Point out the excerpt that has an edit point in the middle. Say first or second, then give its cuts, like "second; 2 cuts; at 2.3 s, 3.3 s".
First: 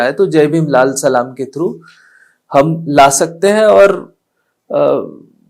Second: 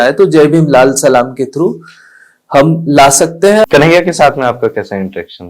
second; 1 cut; at 3.6 s